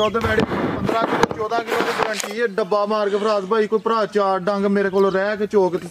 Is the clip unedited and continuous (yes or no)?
yes